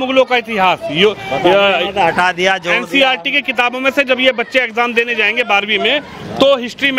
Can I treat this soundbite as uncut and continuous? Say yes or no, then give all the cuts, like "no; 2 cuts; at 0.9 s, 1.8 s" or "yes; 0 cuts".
yes; 0 cuts